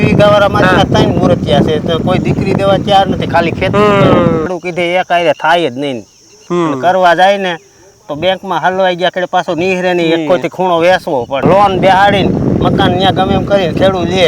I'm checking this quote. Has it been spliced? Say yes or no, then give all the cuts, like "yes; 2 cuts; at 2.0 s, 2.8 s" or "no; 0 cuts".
yes; 2 cuts; at 4.5 s, 11.4 s